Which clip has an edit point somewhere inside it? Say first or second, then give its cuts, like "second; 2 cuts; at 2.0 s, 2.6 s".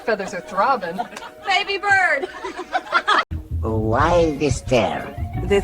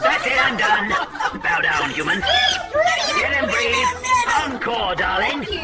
first; 1 cut; at 3.4 s